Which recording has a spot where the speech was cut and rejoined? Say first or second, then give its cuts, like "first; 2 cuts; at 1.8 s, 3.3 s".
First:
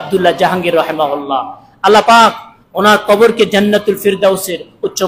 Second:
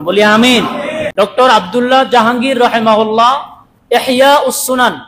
second; 1 cut; at 1.1 s